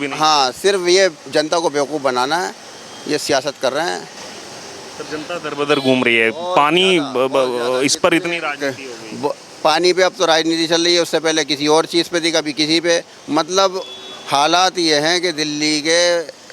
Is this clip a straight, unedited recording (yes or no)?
yes